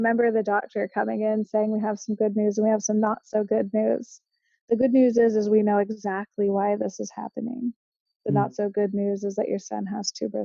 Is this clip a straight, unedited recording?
yes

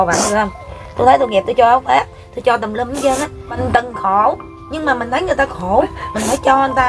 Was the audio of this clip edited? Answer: yes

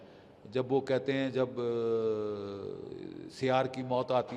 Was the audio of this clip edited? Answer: no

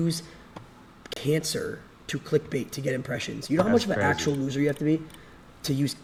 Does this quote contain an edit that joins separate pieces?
no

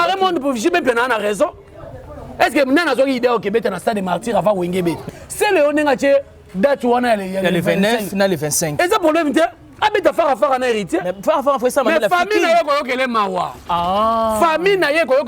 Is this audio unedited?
no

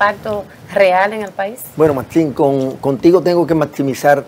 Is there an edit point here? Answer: no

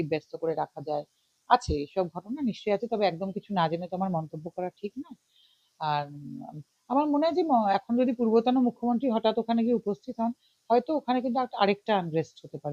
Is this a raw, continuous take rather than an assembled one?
yes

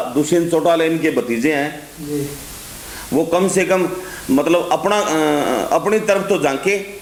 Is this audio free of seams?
yes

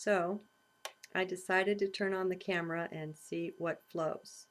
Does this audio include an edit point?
no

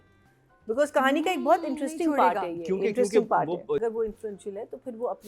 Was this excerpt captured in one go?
no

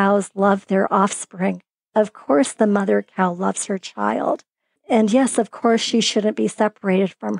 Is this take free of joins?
no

